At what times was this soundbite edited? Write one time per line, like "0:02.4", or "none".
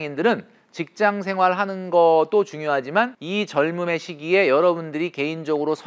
0:03.2